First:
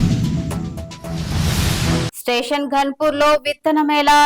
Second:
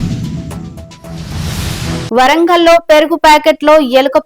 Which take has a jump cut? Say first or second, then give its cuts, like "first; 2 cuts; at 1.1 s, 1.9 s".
first; 1 cut; at 2.1 s